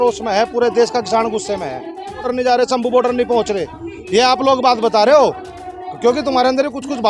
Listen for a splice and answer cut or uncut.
cut